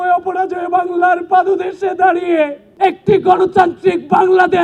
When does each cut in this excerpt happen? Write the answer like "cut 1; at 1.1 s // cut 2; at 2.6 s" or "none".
cut 1; at 2.6 s

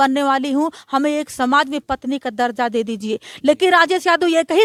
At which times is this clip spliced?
none

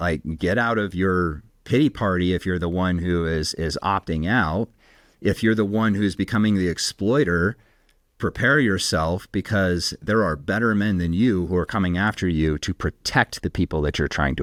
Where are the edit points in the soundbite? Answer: none

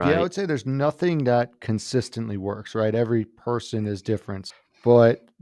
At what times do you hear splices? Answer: cut 1; at 4.4 s

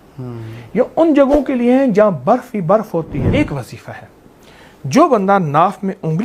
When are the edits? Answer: cut 1; at 3.3 s

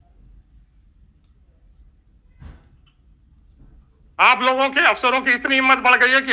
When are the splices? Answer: none

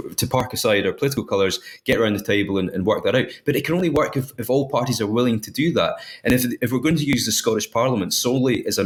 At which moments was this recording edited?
none

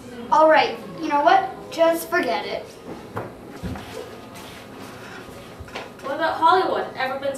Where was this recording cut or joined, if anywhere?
cut 1; at 3.4 s

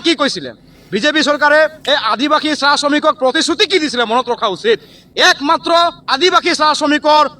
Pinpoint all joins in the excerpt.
cut 1; at 5.0 s

